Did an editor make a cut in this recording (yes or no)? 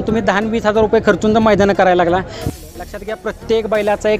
yes